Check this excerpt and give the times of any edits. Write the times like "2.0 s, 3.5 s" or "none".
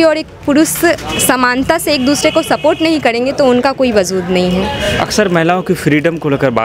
none